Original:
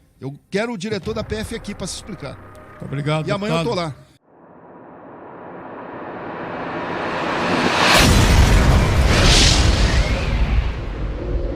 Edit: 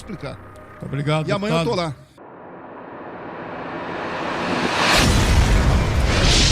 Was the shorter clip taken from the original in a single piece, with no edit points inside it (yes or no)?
no